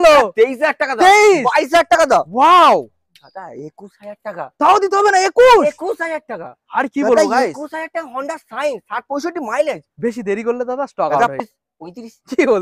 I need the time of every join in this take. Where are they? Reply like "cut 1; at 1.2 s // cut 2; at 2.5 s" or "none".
cut 1; at 11.4 s